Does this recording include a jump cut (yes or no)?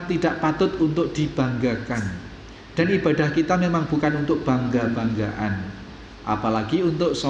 no